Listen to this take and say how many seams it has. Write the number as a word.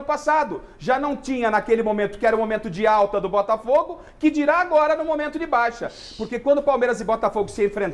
zero